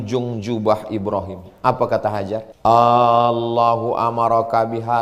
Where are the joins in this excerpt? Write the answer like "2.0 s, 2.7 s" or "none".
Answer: 2.5 s